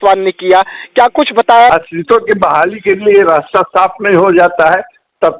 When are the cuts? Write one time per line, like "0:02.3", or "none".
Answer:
0:01.7